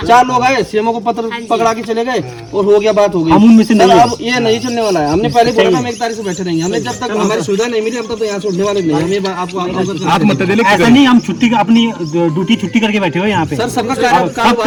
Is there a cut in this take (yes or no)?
no